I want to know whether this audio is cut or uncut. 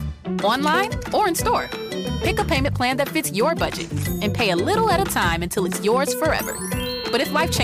uncut